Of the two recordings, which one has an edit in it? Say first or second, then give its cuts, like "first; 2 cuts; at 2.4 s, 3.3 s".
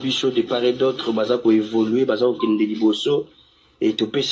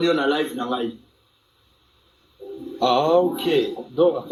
first; 1 cut; at 1.3 s